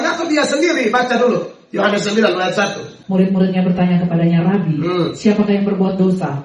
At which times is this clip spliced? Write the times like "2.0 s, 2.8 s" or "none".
2.9 s